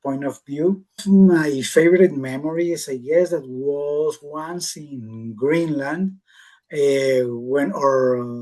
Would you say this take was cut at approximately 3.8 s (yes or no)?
no